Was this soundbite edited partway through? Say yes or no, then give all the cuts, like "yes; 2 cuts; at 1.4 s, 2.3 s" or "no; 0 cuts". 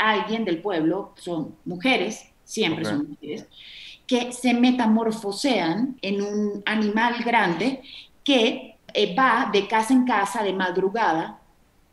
yes; 2 cuts; at 6.0 s, 8.8 s